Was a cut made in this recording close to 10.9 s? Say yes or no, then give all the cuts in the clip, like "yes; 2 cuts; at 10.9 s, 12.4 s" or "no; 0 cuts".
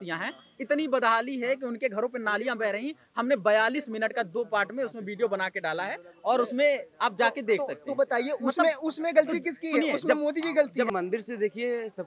yes; 1 cut; at 10.9 s